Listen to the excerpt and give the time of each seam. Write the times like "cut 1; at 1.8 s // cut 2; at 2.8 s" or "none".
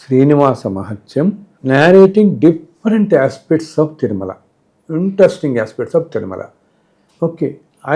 none